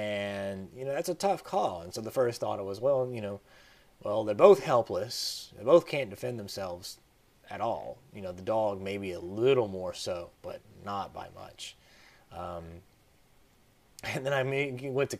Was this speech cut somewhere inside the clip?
no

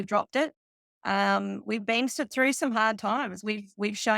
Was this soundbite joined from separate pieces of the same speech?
no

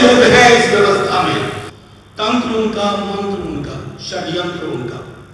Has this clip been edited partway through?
yes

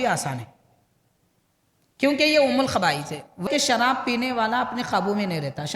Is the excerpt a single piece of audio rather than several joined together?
no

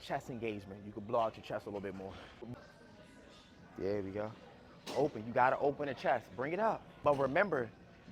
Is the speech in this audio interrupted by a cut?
yes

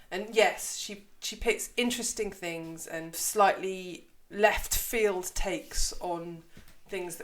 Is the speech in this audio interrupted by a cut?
yes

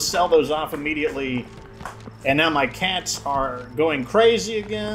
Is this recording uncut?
yes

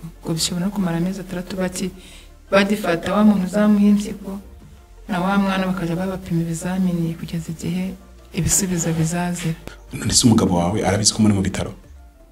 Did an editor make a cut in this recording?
yes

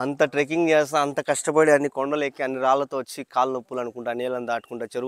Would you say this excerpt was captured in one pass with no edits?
yes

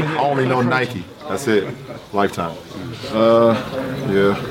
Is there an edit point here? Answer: yes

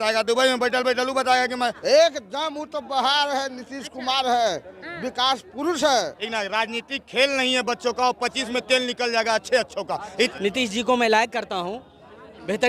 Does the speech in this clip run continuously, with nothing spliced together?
no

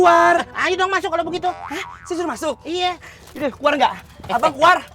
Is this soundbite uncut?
yes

